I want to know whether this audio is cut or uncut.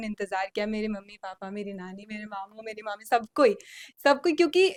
uncut